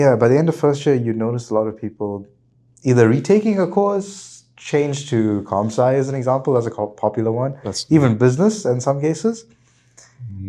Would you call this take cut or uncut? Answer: uncut